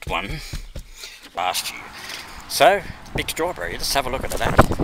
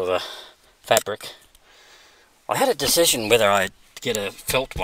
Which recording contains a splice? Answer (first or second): first